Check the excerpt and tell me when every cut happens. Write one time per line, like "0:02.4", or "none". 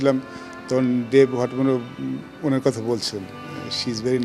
none